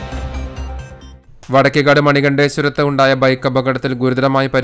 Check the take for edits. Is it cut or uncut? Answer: cut